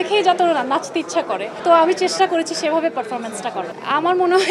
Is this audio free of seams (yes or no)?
yes